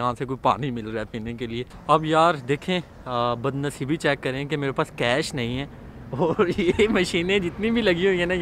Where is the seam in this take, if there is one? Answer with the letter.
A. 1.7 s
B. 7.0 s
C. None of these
A